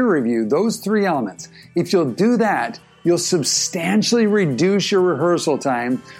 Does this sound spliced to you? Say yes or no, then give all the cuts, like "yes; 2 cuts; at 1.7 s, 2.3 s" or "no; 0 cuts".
no; 0 cuts